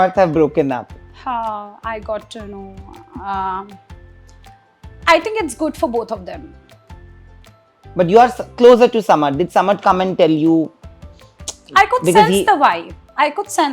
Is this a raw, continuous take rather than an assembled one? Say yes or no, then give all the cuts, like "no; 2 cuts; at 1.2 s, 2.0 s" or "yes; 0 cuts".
yes; 0 cuts